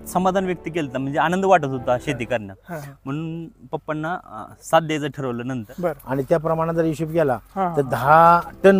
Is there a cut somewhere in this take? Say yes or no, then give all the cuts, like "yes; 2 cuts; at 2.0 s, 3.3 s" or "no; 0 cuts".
yes; 1 cut; at 5.6 s